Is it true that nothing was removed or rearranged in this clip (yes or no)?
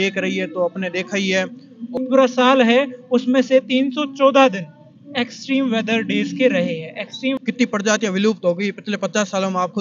no